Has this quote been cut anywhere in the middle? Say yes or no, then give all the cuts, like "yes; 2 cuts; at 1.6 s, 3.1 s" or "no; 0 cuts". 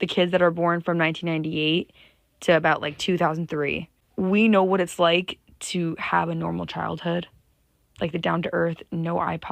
no; 0 cuts